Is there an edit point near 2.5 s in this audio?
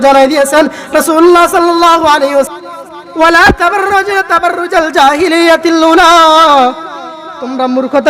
yes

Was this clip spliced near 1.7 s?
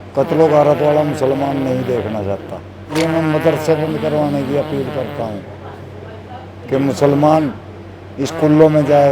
no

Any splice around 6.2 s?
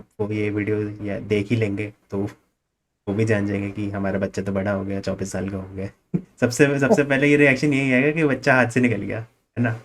yes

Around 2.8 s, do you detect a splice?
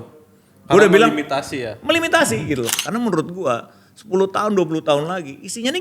yes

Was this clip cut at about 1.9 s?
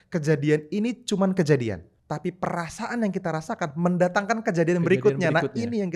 yes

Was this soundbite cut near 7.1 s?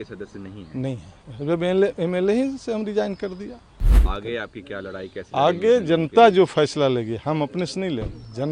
no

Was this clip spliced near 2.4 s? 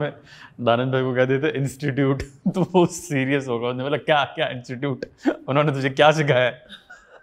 no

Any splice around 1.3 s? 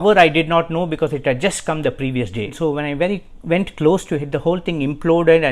no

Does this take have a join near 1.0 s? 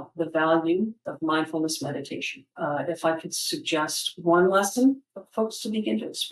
yes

